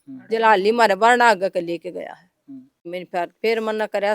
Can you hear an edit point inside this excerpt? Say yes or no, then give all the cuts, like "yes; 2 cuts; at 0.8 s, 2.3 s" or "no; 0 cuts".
yes; 1 cut; at 2.8 s